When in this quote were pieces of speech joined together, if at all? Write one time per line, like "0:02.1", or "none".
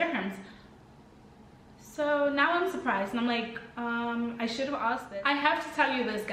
0:05.1